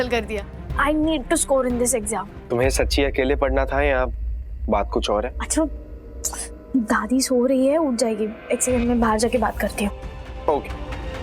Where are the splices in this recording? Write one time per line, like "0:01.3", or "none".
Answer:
0:02.3
0:05.4